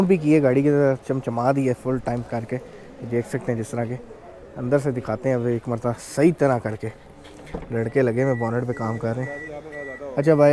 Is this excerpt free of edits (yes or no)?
yes